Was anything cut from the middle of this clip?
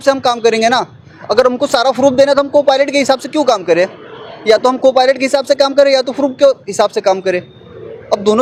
no; 0 cuts

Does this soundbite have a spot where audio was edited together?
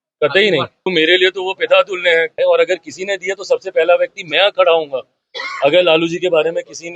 yes; 2 cuts; at 0.9 s, 2.3 s

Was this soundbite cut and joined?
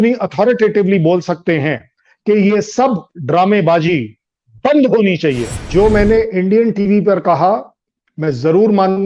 yes; 1 cut; at 5.6 s

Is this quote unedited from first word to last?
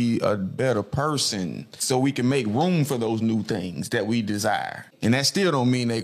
no; 2 cuts; at 1.8 s, 4.9 s

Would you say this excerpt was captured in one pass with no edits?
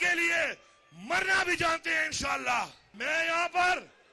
no; 1 cut; at 3.1 s

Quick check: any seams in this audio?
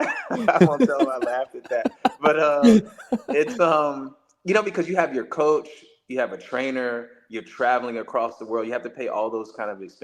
no; 0 cuts

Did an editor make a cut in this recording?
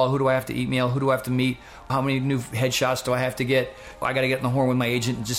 yes; 2 cuts; at 1.9 s, 4.0 s

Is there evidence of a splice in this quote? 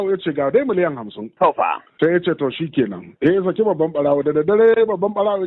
no; 0 cuts

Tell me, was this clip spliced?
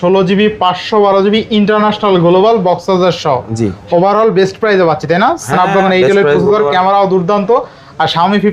no; 0 cuts

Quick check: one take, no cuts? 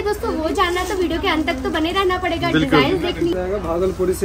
no; 1 cut; at 3.3 s

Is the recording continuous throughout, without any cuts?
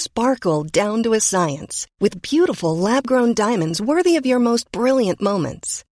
yes; 0 cuts

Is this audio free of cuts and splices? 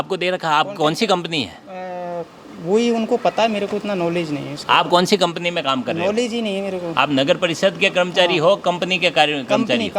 yes; 0 cuts

